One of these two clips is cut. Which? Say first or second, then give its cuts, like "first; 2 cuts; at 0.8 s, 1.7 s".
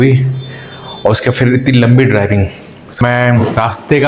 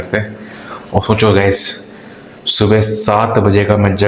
first; 1 cut; at 3.0 s